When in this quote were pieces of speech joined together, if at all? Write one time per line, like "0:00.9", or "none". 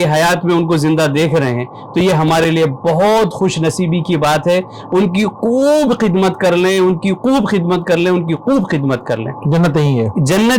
none